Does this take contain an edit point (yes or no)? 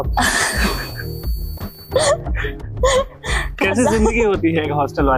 no